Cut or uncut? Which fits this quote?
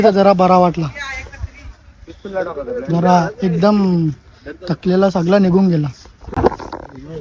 uncut